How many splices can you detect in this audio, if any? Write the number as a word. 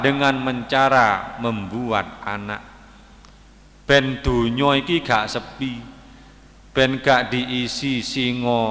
zero